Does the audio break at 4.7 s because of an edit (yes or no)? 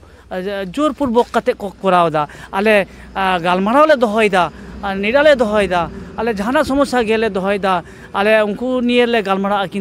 no